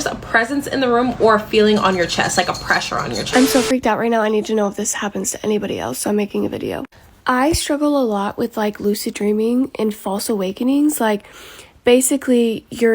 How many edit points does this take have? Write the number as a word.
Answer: one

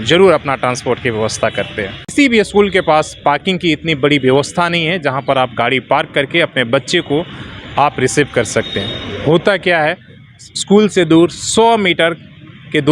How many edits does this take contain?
one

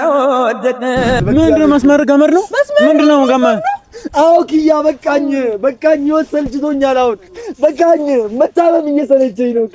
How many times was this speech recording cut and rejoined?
one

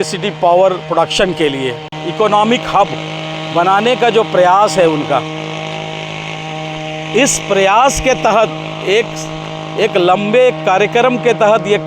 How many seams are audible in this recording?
one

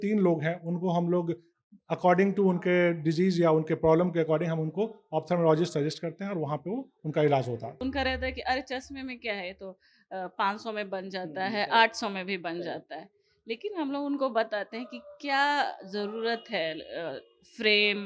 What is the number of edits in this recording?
one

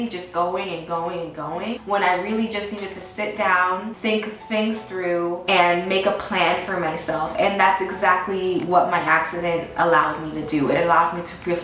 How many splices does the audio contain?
three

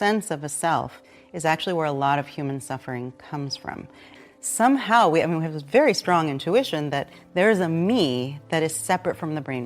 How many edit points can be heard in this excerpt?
one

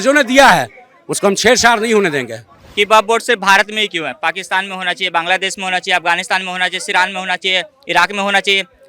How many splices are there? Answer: one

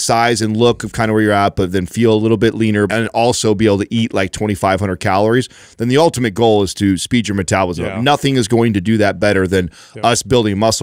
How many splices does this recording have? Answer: one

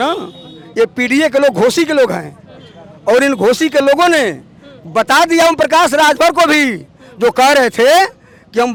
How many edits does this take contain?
zero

